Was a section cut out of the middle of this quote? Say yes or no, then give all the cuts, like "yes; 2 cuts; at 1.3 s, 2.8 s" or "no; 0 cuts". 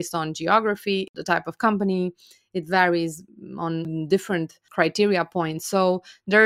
yes; 3 cuts; at 1.1 s, 3.9 s, 4.6 s